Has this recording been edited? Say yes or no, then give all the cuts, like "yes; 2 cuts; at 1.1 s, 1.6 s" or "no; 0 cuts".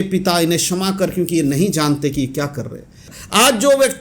yes; 1 cut; at 3.0 s